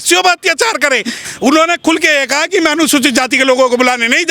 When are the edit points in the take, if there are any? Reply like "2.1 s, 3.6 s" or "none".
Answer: 1.2 s